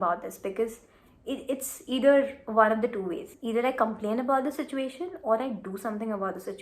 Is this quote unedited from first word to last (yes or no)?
yes